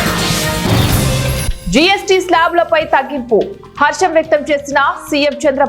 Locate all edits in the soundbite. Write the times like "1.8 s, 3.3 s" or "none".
1.4 s